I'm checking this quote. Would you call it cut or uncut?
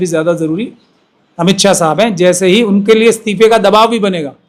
uncut